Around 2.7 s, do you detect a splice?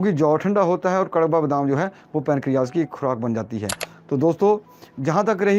no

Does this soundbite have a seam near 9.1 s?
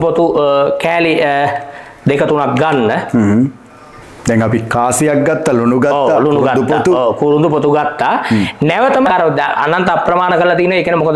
yes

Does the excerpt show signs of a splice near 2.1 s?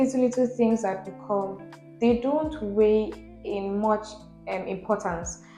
no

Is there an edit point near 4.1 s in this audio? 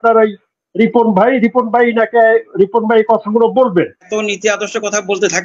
yes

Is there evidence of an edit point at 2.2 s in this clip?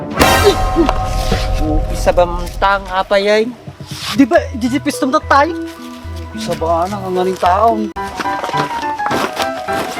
no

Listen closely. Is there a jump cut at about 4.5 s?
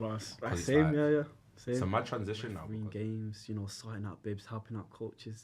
no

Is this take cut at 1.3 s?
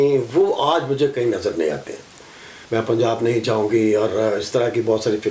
no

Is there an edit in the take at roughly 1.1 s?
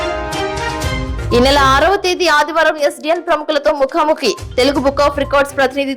yes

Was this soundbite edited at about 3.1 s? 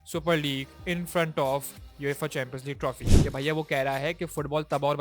yes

